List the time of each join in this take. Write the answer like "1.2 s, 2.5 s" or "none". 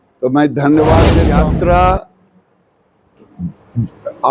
1.3 s